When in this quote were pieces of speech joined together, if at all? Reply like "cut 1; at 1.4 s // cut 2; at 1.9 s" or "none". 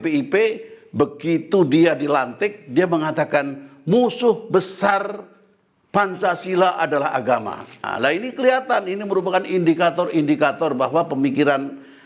cut 1; at 7.9 s